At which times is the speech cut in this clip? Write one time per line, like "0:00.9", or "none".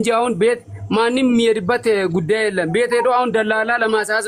none

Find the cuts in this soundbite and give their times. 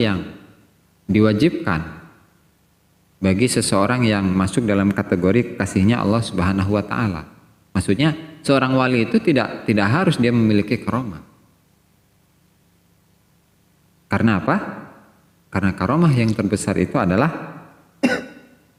none

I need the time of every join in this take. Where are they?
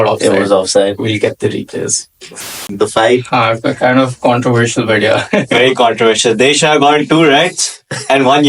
0:02.7

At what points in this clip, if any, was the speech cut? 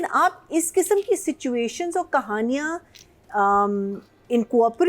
none

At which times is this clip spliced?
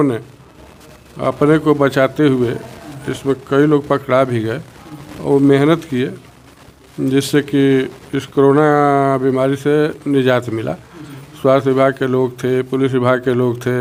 none

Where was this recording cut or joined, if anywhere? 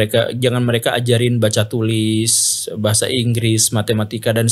none

